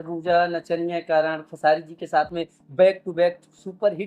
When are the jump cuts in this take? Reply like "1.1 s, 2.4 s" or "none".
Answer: none